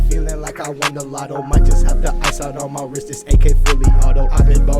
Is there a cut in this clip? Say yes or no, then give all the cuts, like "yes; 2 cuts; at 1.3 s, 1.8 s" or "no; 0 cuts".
yes; 1 cut; at 0.9 s